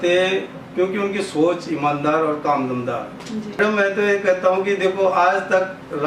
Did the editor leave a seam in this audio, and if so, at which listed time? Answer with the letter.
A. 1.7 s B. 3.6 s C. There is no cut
B